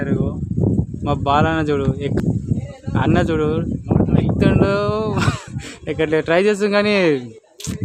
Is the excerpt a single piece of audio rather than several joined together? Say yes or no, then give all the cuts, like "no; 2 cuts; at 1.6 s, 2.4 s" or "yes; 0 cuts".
no; 1 cut; at 2.2 s